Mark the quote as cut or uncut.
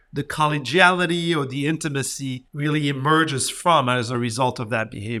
cut